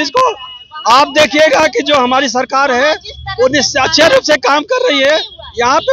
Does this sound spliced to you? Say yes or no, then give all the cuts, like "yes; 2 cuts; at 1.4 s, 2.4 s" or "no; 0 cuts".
no; 0 cuts